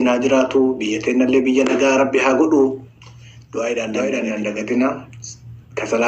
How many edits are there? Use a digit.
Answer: 1